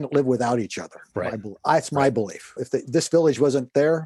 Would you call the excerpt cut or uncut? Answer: uncut